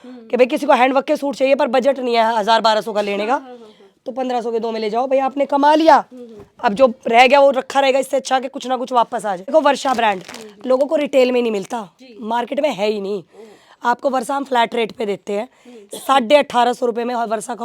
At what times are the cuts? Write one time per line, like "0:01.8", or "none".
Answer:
0:09.5